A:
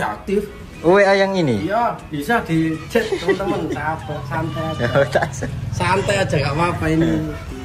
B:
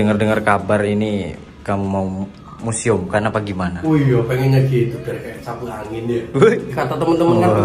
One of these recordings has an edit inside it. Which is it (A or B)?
B